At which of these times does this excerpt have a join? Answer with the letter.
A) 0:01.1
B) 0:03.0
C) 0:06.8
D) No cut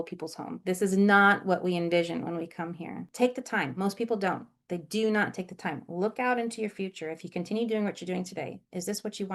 B